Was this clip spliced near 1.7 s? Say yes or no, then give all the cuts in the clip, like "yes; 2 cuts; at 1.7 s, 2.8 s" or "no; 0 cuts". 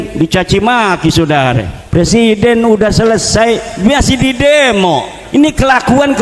yes; 2 cuts; at 1.7 s, 5.1 s